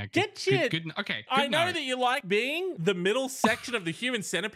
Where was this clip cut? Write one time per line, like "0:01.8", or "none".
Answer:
0:01.2
0:02.5